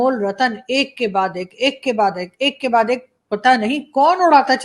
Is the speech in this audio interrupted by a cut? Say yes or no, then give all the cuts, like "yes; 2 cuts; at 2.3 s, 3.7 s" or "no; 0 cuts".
no; 0 cuts